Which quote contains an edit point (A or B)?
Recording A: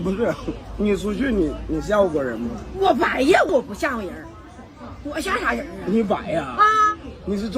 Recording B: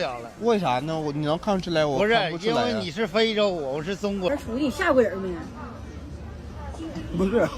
B